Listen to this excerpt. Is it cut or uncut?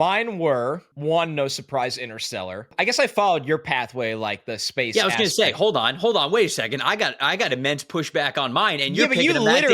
cut